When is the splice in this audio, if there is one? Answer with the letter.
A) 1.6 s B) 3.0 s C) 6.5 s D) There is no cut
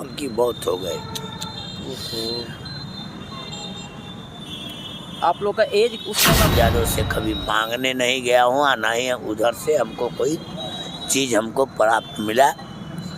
C